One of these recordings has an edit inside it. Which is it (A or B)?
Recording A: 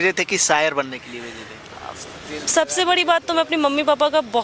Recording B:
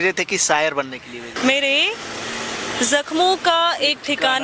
B